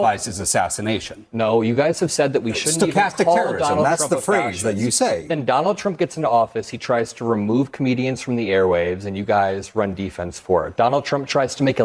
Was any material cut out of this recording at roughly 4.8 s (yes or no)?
yes